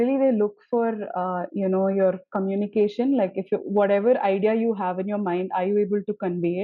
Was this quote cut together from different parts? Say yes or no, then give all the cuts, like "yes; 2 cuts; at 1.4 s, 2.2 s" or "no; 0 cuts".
no; 0 cuts